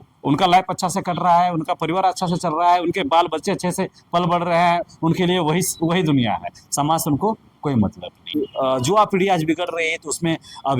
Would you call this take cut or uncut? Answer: cut